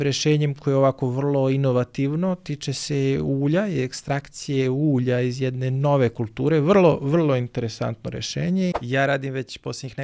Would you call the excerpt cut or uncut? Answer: cut